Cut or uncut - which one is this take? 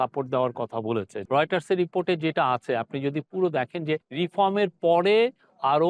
cut